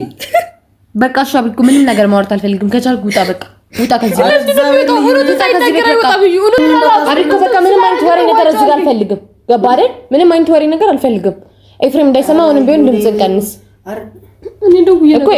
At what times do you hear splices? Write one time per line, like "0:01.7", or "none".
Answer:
0:06.6